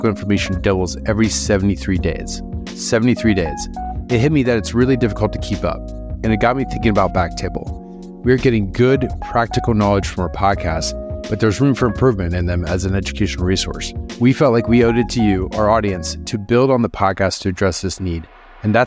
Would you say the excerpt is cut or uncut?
uncut